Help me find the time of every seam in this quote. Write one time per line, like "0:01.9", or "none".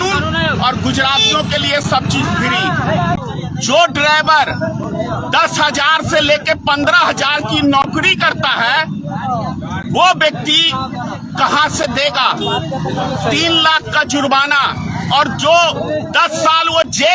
0:03.2